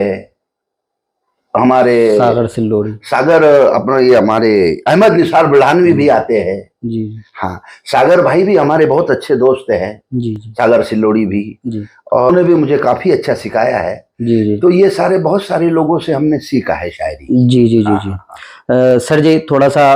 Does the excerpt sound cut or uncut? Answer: uncut